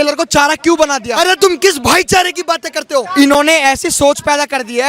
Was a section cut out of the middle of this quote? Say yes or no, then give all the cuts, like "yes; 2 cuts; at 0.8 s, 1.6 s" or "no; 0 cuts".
yes; 2 cuts; at 1.1 s, 2.9 s